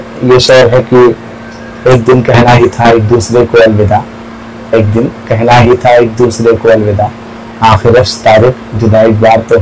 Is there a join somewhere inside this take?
no; 0 cuts

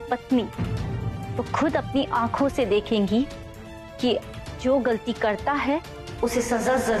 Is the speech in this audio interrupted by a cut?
no; 0 cuts

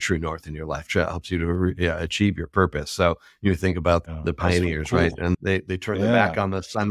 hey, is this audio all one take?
no; 1 cut; at 4.0 s

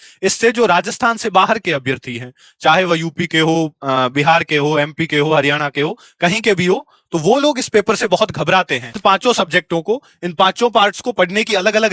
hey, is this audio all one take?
no; 1 cut; at 8.9 s

